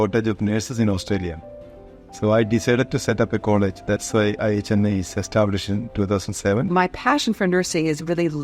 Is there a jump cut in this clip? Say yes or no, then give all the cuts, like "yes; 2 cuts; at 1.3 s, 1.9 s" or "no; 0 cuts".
yes; 1 cut; at 6.7 s